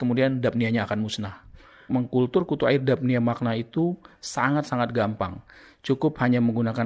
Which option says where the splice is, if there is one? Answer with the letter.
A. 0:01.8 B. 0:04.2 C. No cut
A